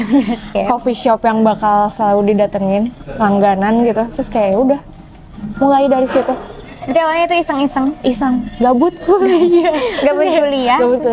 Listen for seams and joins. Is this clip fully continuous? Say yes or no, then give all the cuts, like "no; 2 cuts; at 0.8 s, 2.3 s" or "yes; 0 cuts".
yes; 0 cuts